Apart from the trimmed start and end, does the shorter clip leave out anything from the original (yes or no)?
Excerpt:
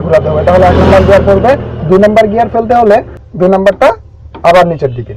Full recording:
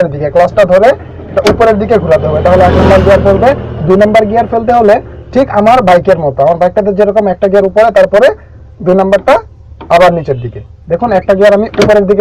yes